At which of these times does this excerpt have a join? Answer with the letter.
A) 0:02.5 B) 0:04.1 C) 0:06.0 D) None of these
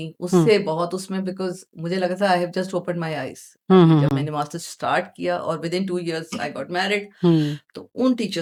D